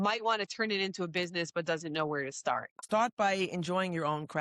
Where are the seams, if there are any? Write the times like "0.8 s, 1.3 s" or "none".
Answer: 2.8 s